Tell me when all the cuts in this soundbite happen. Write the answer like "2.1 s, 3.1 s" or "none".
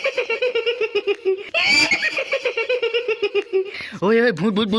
1.5 s, 3.8 s

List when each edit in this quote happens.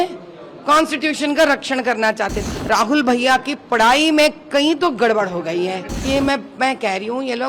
2.4 s, 5.9 s

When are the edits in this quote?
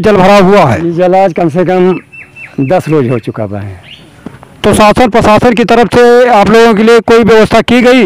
none

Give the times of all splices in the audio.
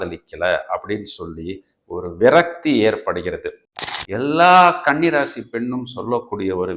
3.7 s

